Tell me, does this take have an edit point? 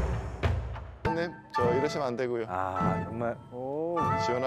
yes; 1 cut; at 1.1 s

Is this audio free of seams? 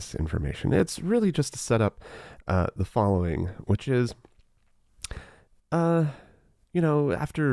yes; 0 cuts

